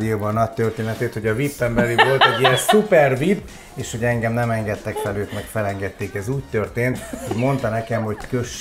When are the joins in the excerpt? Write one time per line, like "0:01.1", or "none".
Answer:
none